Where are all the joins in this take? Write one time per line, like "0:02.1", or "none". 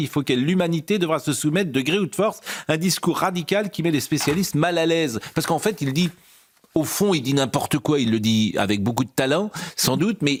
none